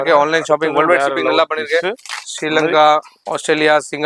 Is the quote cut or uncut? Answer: uncut